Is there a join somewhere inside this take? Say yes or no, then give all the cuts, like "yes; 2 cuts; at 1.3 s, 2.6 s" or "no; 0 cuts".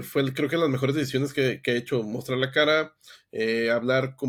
no; 0 cuts